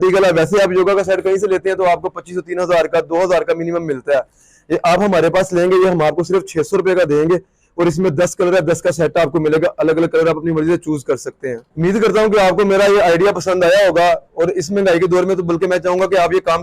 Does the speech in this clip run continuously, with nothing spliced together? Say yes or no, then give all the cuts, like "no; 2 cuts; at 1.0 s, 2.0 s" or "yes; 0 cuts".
yes; 0 cuts